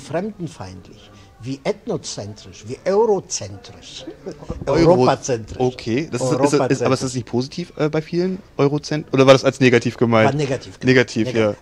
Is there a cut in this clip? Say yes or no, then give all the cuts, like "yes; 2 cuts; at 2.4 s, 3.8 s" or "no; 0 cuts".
no; 0 cuts